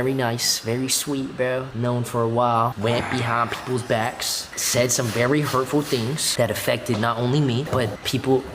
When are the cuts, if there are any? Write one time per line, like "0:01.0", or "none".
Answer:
none